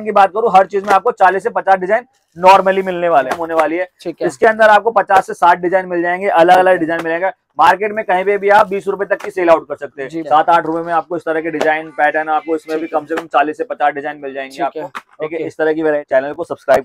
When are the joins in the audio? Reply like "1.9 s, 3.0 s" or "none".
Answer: 3.3 s, 10.1 s, 16.0 s